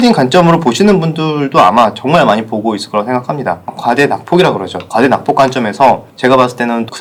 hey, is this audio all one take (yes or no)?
yes